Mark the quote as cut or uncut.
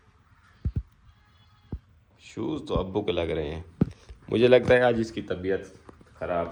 uncut